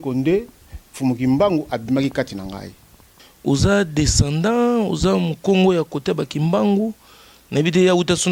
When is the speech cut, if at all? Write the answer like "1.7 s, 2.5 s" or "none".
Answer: 3.0 s

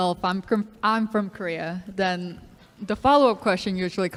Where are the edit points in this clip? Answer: none

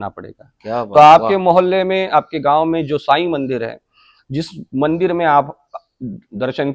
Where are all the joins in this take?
none

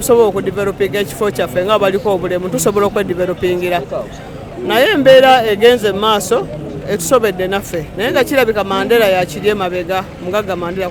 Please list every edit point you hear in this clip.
none

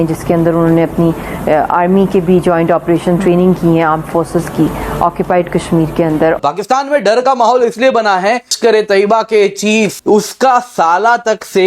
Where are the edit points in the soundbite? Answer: 6.4 s, 8.5 s, 10.0 s

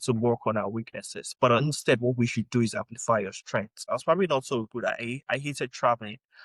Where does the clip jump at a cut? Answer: 3.8 s

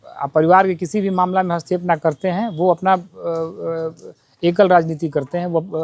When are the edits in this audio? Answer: none

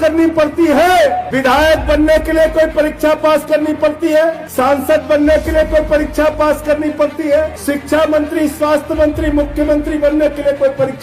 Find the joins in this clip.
1.3 s, 4.4 s, 7.6 s

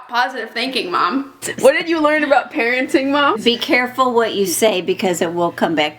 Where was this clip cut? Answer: 1.5 s, 3.4 s

